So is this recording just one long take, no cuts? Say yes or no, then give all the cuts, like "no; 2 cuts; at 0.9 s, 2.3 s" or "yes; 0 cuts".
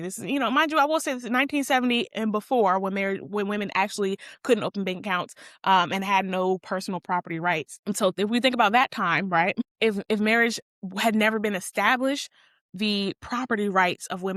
yes; 0 cuts